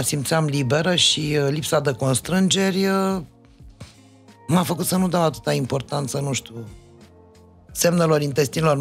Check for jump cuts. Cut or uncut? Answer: uncut